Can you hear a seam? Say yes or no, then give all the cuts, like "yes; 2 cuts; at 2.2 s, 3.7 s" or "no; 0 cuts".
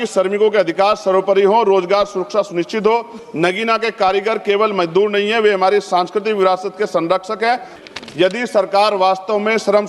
yes; 2 cuts; at 3.2 s, 7.7 s